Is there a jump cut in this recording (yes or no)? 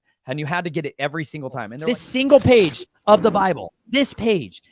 yes